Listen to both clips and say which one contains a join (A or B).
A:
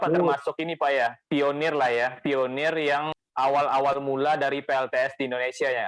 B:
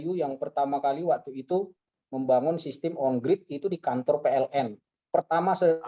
A